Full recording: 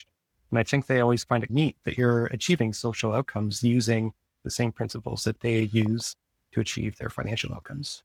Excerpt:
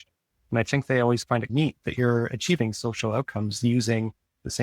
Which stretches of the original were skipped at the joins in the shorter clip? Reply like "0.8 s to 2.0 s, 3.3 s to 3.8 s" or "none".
none